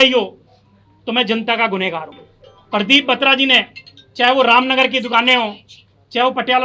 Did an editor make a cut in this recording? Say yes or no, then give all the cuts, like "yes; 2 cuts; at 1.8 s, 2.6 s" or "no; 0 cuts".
yes; 1 cut; at 2.2 s